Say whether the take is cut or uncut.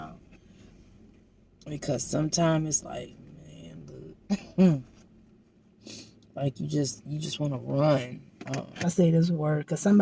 cut